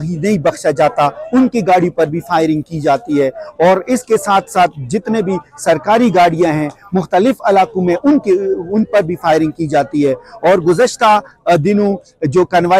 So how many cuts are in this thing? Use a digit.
0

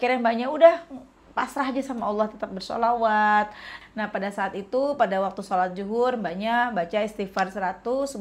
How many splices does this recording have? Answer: 1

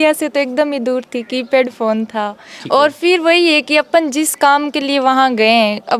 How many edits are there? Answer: 0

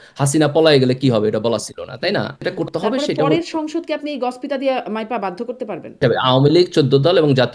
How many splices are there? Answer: 2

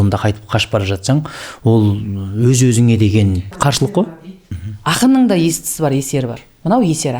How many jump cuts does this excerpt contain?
0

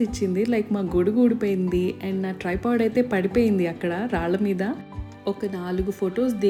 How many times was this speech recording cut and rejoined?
0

